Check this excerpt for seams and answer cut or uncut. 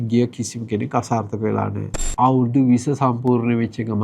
cut